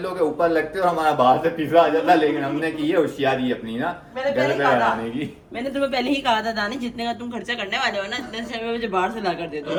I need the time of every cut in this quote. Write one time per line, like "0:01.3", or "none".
none